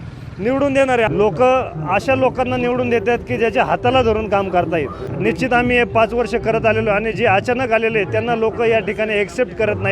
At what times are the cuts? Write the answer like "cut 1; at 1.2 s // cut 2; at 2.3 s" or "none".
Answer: cut 1; at 1.1 s // cut 2; at 5.0 s